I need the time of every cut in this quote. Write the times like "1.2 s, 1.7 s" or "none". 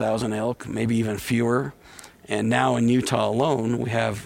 none